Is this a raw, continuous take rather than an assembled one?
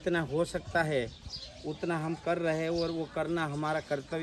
yes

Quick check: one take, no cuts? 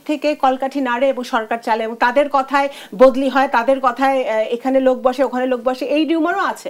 yes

